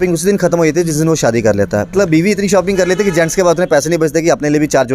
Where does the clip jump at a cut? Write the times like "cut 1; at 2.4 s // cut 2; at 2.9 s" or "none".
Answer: cut 1; at 1.9 s

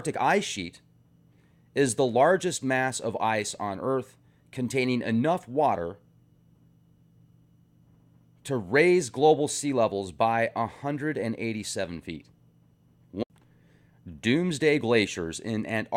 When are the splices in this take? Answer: none

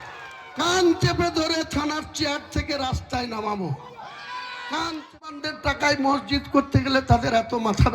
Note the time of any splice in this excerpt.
cut 1; at 5.4 s

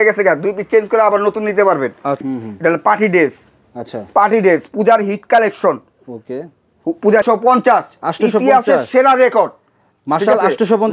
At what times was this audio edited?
cut 1; at 2.2 s // cut 2; at 7.2 s

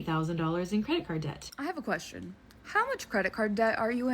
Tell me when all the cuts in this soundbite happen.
cut 1; at 1.5 s

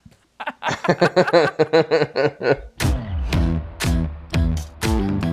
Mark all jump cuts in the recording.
cut 1; at 3.0 s

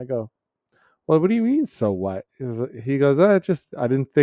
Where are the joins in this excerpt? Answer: none

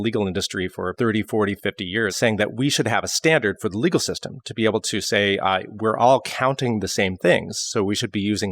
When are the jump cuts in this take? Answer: cut 1; at 0.9 s // cut 2; at 2.1 s

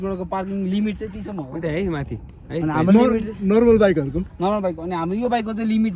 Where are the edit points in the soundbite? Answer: none

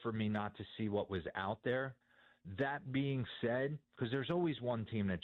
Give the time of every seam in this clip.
none

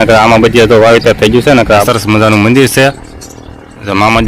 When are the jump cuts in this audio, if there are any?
cut 1; at 1.8 s

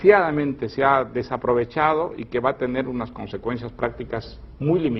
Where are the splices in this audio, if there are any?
none

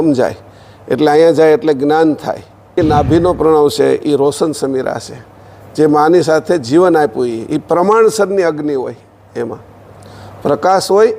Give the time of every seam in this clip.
cut 1; at 2.8 s

